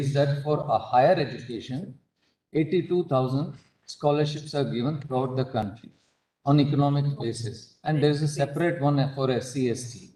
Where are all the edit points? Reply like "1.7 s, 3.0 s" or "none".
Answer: none